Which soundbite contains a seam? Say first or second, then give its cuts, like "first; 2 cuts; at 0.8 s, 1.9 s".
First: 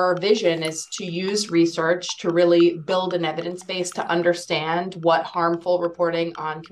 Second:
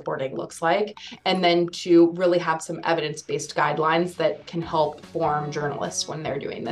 second; 2 cuts; at 1.1 s, 5.0 s